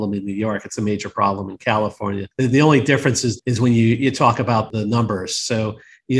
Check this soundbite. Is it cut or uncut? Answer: cut